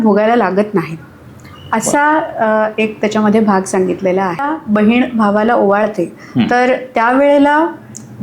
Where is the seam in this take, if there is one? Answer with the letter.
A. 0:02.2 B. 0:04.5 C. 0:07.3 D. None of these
B